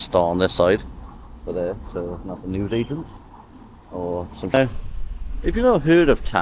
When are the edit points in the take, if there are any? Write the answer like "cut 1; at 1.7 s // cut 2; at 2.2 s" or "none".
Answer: cut 1; at 4.5 s